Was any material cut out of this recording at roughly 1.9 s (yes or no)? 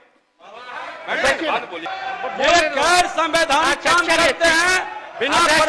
yes